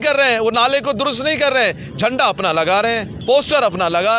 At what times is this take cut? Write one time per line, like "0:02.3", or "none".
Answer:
0:03.1

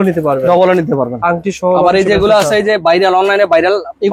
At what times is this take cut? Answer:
none

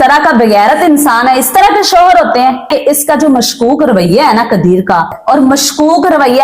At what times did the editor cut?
0:02.7
0:05.2

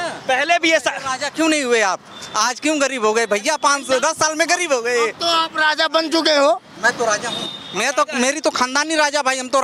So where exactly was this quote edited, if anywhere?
none

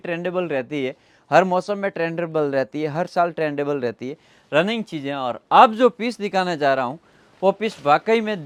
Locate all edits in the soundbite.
none

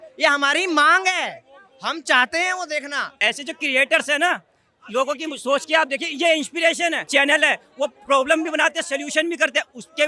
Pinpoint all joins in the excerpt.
0:03.1
0:07.1

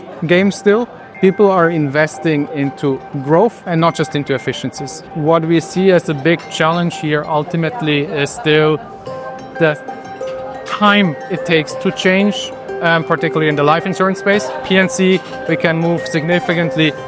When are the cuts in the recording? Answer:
0:03.6
0:05.1

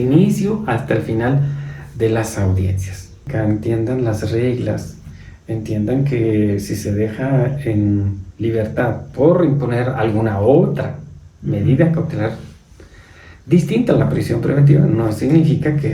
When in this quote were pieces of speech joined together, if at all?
0:03.3

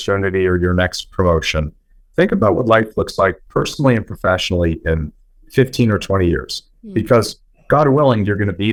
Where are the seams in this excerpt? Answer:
none

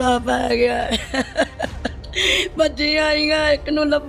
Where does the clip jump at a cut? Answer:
none

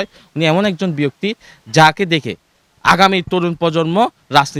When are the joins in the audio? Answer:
none

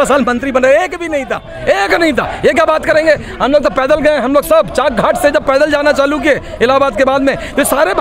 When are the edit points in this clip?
none

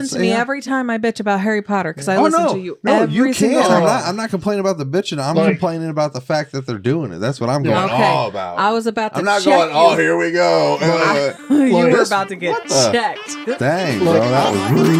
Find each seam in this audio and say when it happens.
none

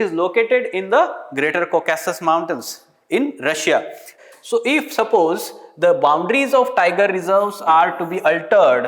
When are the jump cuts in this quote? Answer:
0:04.1

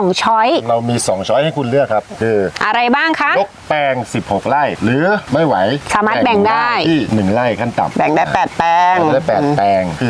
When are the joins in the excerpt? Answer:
none

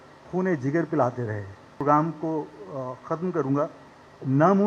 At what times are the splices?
0:01.7

